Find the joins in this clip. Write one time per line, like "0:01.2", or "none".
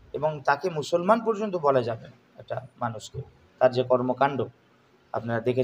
none